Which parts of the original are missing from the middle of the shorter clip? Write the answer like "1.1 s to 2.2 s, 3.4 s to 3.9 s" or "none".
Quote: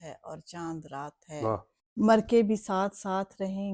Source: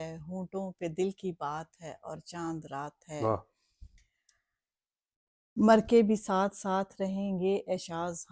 3.6 s to 5.4 s